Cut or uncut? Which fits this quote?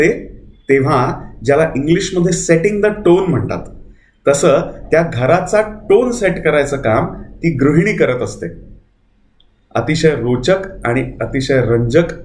uncut